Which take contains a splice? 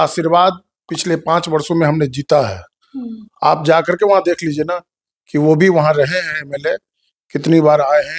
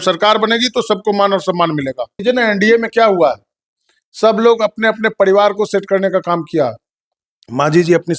second; 1 cut; at 2.2 s

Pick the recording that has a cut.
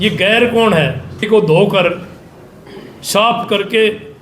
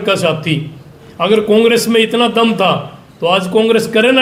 first; 1 cut; at 1.2 s

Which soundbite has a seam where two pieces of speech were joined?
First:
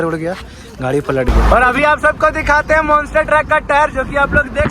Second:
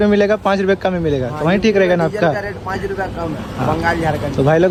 first; 1 cut; at 1.4 s

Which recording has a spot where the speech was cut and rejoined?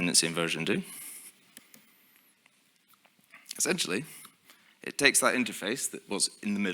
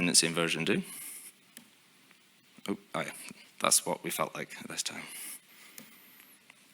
first; 1 cut; at 1.6 s

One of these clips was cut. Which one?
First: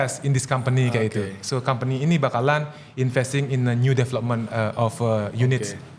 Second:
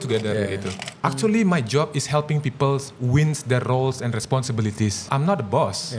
second; 2 cuts; at 0.9 s, 5.0 s

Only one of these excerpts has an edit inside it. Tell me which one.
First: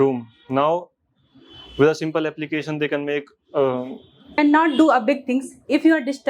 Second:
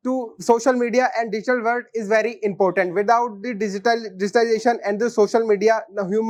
first; 1 cut; at 4.4 s

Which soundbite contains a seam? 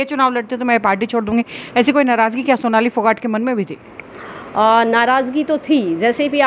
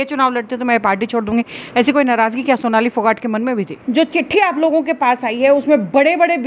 second; 1 cut; at 3.8 s

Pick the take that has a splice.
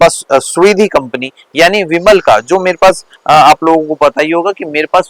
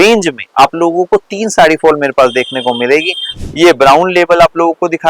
second; 1 cut; at 3.3 s

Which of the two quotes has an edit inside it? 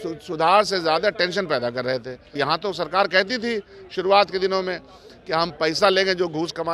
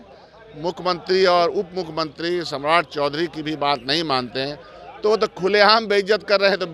first; 1 cut; at 2.3 s

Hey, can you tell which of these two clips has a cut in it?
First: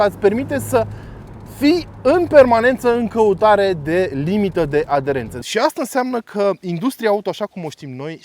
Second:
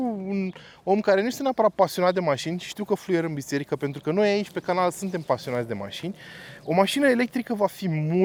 first; 1 cut; at 5.4 s

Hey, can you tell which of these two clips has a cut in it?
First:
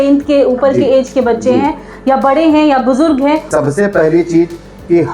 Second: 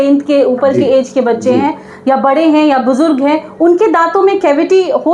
first; 1 cut; at 3.5 s

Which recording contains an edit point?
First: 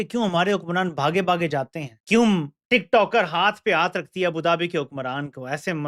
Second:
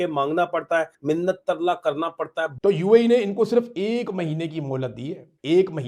second; 1 cut; at 2.5 s

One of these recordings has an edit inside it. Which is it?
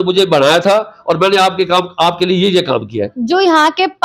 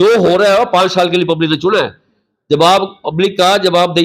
first; 1 cut; at 3.1 s

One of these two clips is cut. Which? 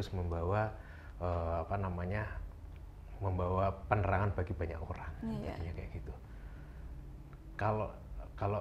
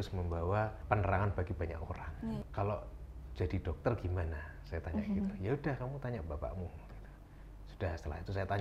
second; 2 cuts; at 0.8 s, 2.4 s

